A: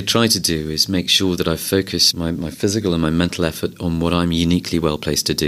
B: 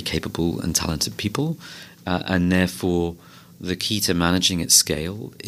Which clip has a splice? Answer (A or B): A